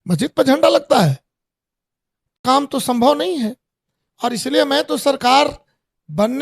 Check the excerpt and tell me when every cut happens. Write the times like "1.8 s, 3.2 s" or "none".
2.4 s